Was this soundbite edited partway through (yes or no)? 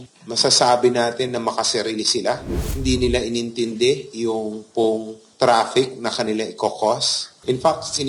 no